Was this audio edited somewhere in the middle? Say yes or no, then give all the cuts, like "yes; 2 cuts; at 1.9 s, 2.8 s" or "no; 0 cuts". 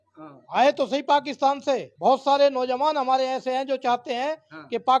yes; 1 cut; at 1.9 s